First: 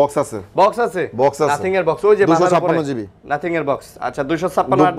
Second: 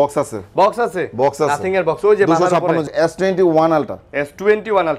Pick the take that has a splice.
second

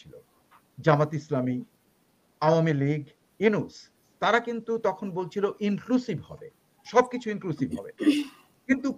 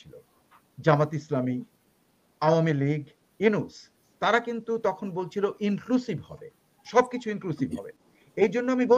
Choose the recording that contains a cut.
second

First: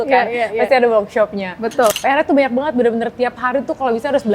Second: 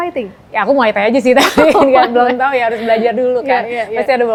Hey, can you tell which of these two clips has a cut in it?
first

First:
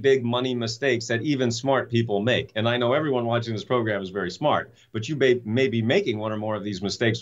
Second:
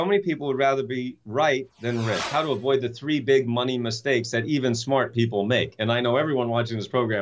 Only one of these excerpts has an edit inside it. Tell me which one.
second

